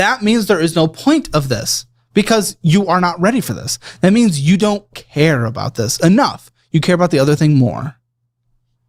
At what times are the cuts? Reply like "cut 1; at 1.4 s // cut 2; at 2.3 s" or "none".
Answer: cut 1; at 4.1 s